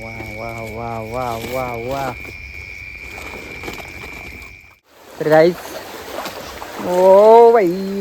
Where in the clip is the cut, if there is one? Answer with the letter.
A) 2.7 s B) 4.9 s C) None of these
B